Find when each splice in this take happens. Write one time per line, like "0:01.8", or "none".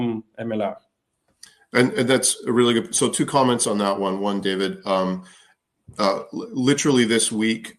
none